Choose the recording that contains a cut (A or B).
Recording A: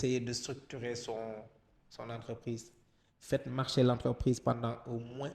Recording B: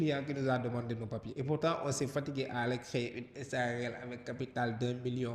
B